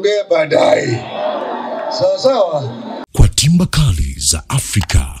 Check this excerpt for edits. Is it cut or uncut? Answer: cut